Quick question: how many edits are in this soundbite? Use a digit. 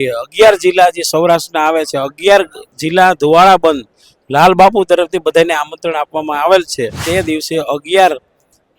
1